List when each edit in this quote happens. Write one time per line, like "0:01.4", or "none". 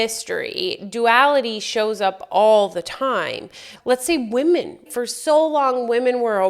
0:03.7
0:04.8